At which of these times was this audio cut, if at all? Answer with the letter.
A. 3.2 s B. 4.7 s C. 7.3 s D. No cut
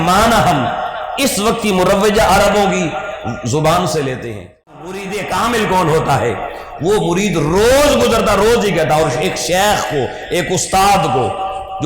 B